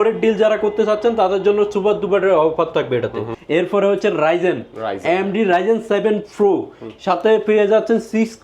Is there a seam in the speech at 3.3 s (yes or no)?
yes